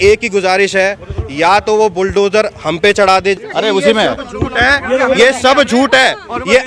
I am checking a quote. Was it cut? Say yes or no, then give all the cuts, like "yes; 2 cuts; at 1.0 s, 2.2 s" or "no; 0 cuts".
yes; 1 cut; at 3.4 s